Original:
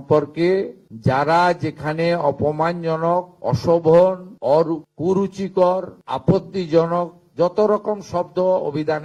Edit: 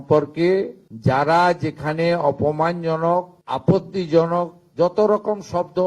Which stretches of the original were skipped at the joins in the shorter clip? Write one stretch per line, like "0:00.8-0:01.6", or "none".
0:03.3-0:05.9